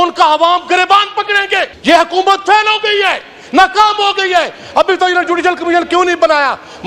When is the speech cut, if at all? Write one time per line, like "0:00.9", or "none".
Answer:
0:01.7